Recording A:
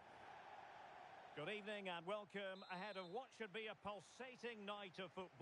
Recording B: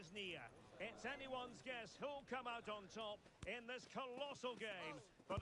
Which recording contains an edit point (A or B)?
A